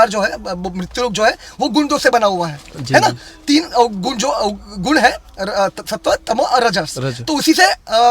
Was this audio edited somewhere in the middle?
no; 0 cuts

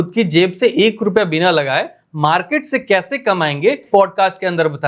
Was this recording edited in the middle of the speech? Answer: yes; 1 cut; at 3.8 s

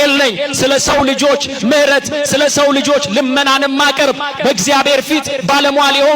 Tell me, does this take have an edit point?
no; 0 cuts

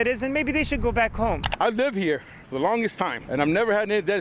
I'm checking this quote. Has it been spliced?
yes; 2 cuts; at 1.5 s, 3.2 s

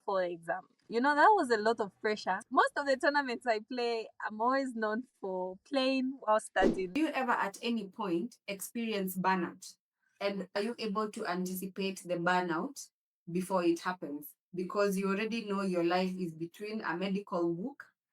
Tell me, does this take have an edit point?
yes; 2 cuts; at 2.3 s, 6.9 s

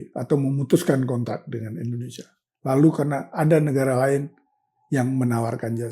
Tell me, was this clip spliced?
no; 0 cuts

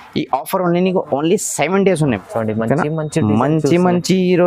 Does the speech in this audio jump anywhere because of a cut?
yes; 1 cut; at 2.2 s

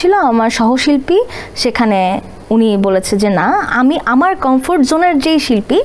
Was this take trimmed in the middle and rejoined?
no; 0 cuts

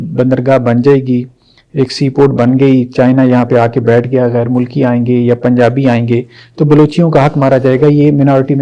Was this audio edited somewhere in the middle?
no; 0 cuts

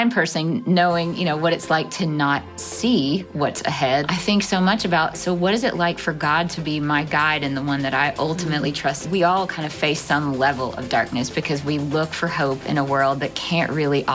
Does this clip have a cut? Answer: yes; 2 cuts; at 4.1 s, 9.0 s

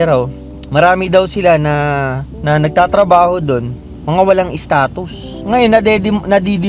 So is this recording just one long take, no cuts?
yes; 0 cuts

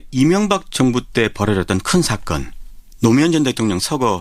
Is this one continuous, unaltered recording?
yes; 0 cuts

